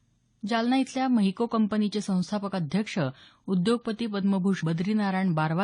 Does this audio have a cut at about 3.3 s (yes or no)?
no